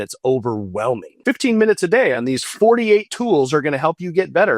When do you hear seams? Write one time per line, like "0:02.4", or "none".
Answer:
0:01.1